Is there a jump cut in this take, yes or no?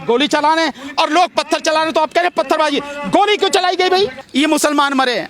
yes